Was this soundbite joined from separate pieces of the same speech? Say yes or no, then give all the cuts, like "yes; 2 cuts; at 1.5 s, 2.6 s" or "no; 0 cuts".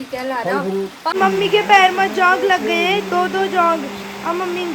yes; 1 cut; at 1.1 s